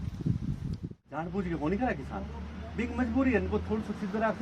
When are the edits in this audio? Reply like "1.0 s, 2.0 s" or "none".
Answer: 0.9 s